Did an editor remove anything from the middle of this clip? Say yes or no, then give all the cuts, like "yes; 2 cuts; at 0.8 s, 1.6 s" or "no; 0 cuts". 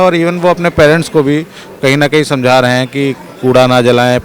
no; 0 cuts